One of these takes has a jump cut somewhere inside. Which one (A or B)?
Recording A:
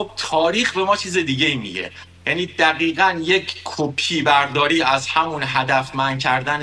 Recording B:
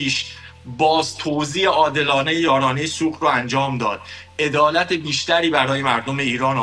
B